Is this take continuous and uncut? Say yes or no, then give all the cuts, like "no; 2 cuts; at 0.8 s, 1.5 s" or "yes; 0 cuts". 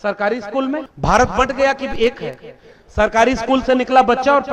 no; 1 cut; at 0.9 s